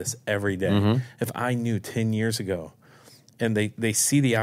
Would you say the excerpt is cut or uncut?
uncut